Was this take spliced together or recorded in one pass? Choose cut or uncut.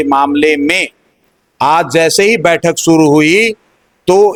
uncut